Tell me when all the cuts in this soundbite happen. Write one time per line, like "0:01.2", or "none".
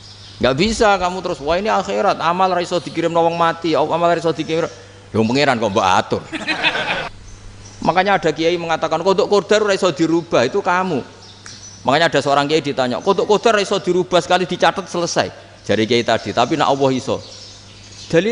0:07.1